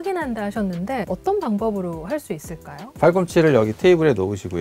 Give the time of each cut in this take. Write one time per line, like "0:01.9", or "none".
0:01.1
0:02.8